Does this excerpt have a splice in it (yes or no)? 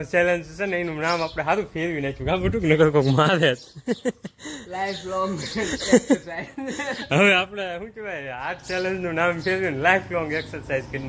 no